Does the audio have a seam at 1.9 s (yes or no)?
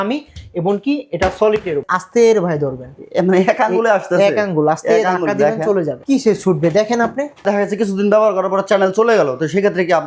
yes